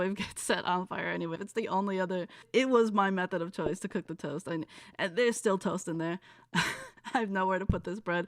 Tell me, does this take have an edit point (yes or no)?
yes